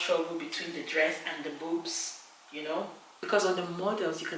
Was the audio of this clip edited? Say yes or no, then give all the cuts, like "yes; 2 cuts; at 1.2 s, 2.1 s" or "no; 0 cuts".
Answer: yes; 1 cut; at 3.1 s